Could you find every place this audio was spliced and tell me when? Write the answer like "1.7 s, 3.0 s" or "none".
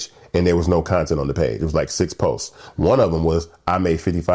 none